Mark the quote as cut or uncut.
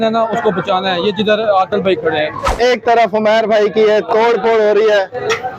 cut